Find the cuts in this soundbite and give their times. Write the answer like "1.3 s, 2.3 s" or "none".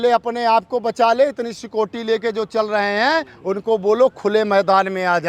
none